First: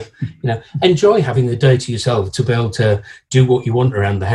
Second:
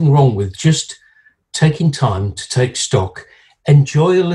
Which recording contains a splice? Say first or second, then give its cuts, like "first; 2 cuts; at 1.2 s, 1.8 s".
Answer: first; 1 cut; at 1.4 s